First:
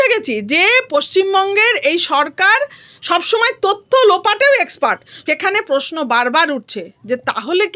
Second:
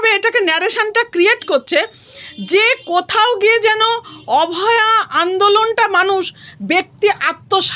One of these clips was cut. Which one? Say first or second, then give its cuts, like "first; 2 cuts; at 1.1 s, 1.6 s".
first; 1 cut; at 5.1 s